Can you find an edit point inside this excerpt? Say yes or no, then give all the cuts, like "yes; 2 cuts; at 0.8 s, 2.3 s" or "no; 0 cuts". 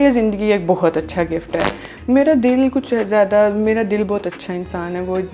yes; 1 cut; at 1.9 s